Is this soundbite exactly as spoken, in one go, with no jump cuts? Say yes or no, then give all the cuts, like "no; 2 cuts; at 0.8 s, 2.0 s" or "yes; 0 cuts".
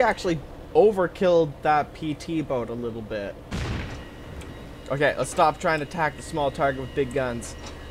no; 1 cut; at 3.5 s